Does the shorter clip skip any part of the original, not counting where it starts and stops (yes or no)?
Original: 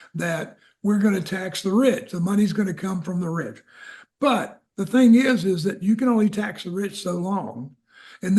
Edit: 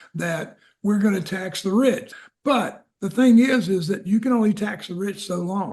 yes